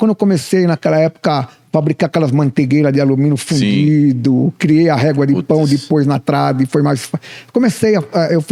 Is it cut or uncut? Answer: uncut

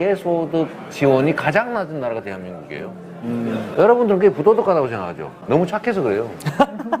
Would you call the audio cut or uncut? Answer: uncut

